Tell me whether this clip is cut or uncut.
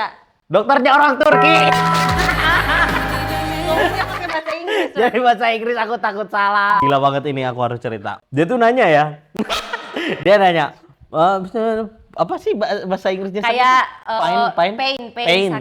cut